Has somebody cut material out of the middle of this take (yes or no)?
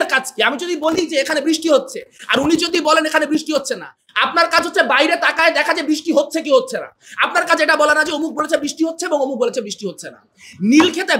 no